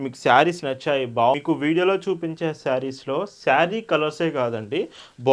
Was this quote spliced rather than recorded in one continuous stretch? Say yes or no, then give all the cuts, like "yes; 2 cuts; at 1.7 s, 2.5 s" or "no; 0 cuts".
yes; 1 cut; at 1.3 s